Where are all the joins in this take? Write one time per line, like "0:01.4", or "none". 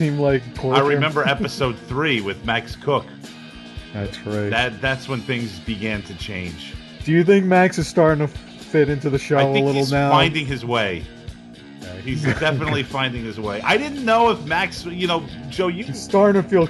0:06.1